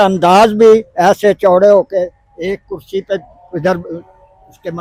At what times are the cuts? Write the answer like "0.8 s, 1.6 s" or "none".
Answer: none